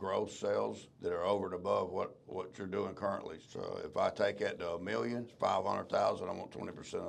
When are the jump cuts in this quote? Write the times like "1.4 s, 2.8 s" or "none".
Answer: 0.9 s, 3.4 s, 5.3 s